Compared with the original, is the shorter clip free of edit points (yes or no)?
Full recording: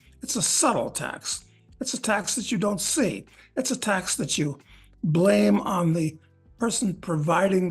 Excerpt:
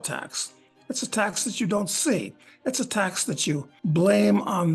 no